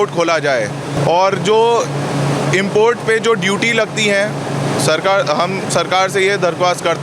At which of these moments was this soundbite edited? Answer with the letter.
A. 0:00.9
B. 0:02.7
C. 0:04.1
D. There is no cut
A